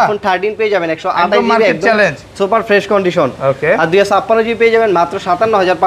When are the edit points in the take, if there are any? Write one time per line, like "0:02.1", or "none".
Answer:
none